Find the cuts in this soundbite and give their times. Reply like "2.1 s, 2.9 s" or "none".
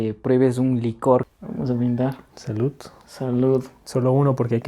1.3 s